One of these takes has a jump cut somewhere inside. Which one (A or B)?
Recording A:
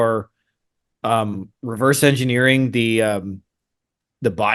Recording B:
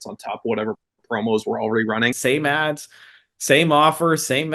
B